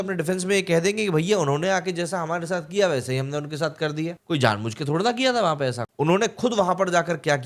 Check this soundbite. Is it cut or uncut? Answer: cut